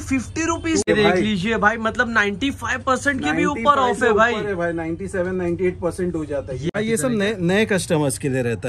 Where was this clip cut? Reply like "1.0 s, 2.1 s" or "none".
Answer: 0.9 s, 6.7 s